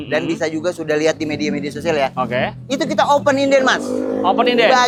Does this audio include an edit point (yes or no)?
no